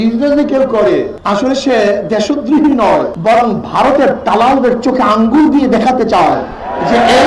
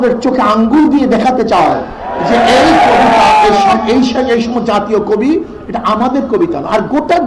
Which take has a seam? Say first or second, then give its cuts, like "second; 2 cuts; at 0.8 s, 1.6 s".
first; 2 cuts; at 1.2 s, 3.1 s